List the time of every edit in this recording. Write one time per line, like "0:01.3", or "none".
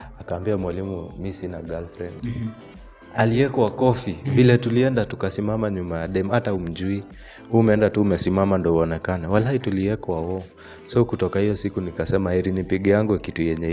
none

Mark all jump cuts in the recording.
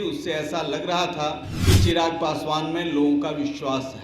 0:01.5

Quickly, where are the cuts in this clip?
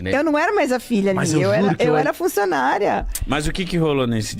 none

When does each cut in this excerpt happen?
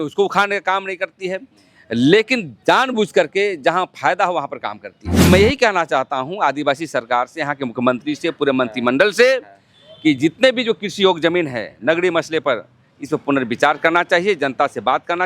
0:05.3

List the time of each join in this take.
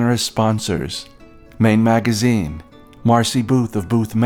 none

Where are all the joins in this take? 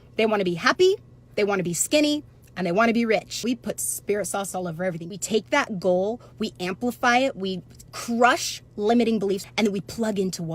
0:03.3
0:05.1
0:09.4

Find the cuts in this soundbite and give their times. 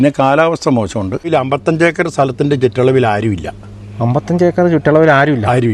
0:01.3

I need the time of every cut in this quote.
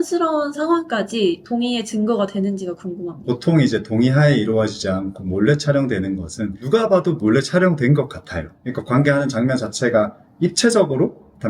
0:03.1

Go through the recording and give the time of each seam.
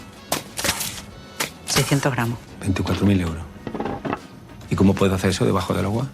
0:02.5

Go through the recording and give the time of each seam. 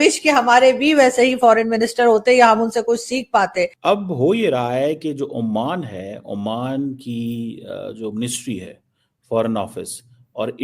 0:03.8

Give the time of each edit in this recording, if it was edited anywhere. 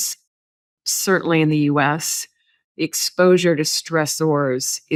none

